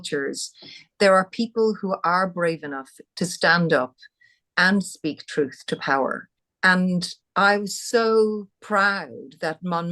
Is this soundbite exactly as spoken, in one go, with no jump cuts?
no; 2 cuts; at 6.6 s, 8.5 s

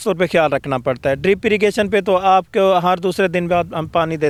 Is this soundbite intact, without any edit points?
yes; 0 cuts

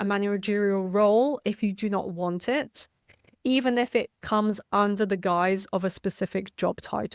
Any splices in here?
no; 0 cuts

